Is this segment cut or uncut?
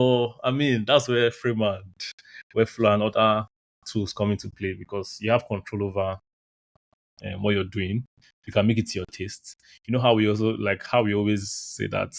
uncut